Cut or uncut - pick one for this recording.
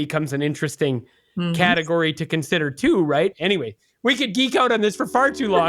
cut